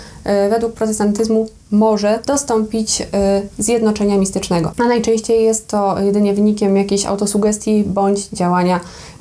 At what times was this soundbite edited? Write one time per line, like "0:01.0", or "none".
0:02.2
0:04.7